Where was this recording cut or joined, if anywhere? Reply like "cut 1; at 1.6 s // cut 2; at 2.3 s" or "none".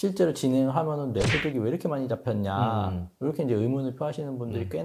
none